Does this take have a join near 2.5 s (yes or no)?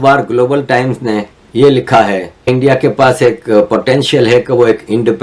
yes